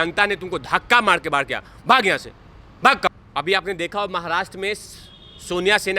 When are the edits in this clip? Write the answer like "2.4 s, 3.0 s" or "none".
3.1 s